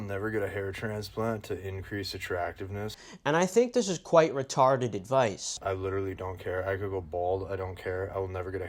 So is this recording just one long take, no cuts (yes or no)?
no